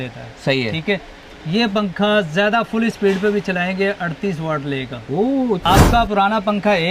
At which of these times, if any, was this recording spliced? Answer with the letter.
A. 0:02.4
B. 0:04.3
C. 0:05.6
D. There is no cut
C